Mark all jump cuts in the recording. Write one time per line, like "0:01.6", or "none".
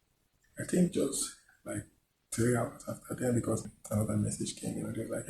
0:03.8